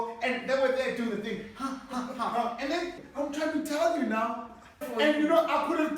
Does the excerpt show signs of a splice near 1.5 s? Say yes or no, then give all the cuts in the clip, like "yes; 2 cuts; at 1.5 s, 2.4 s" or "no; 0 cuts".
no; 2 cuts; at 3.0 s, 4.8 s